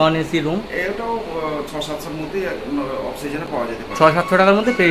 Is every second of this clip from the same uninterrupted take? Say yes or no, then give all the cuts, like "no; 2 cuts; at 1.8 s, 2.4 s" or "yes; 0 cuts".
yes; 0 cuts